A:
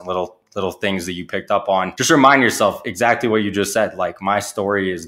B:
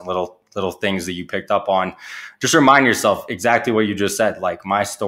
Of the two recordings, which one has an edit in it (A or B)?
A